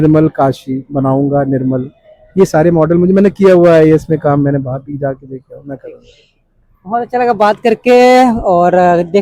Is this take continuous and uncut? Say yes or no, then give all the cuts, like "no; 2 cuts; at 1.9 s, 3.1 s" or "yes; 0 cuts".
yes; 0 cuts